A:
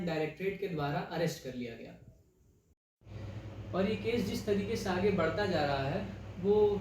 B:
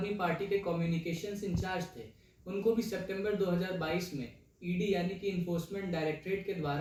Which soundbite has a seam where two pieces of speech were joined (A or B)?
A